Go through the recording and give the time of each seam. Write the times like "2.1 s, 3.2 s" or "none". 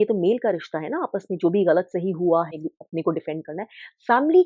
2.5 s